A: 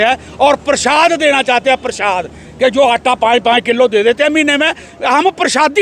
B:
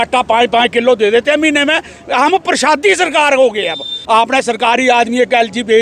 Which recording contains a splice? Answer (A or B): B